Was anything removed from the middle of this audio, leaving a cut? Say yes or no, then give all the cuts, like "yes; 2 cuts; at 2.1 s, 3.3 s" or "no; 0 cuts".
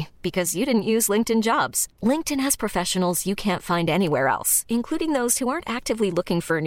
no; 0 cuts